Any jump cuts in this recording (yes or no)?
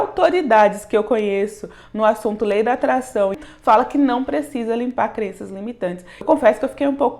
yes